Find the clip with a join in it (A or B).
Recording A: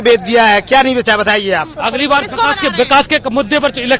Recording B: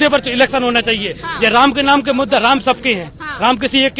A